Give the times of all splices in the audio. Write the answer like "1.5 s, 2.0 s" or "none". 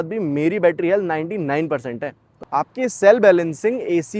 2.3 s